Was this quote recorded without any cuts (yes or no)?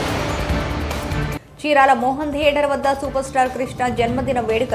no